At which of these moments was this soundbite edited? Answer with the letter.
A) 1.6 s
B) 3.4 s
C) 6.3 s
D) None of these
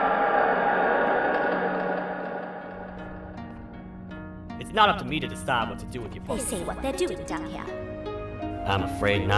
C